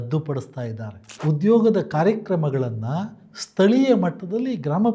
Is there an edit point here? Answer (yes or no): yes